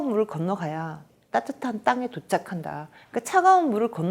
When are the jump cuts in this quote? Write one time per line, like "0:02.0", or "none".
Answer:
0:01.0